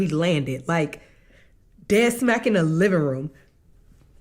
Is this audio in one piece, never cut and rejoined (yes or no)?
yes